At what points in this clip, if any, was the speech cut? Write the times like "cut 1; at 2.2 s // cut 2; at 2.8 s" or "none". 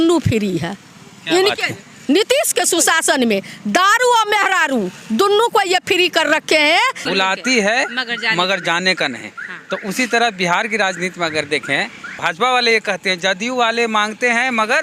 cut 1; at 7.0 s // cut 2; at 12.1 s